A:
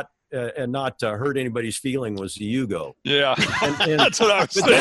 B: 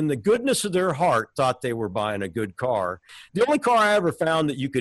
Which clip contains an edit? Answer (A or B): B